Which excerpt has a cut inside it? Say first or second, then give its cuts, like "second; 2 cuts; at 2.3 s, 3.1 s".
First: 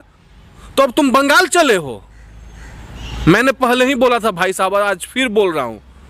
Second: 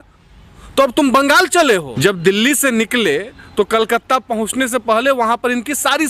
second; 1 cut; at 1.9 s